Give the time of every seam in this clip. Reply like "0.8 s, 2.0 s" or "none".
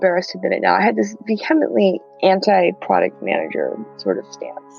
1.2 s